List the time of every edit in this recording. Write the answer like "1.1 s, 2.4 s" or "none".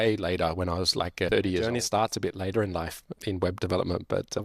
1.6 s